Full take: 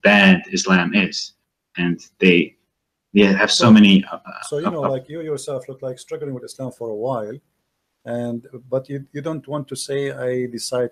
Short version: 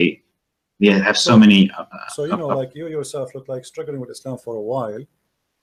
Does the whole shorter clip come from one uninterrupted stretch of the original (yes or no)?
yes